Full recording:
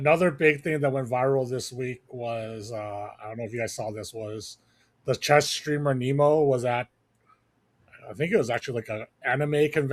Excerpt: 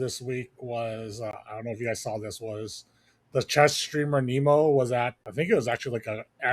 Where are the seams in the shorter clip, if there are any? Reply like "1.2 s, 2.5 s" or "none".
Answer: 1.3 s, 5.2 s

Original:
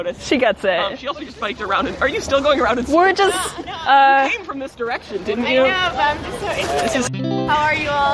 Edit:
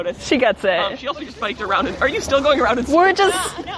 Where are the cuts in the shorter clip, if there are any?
none

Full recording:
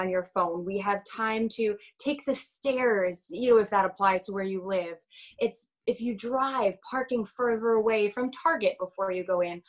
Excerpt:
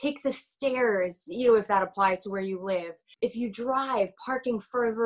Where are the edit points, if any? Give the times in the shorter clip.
3.0 s

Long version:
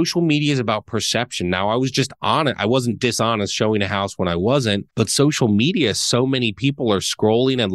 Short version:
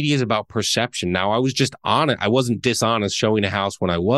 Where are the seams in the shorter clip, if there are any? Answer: none

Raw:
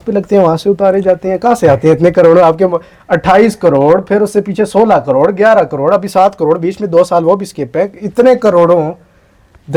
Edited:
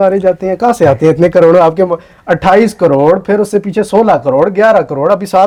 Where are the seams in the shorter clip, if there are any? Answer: none

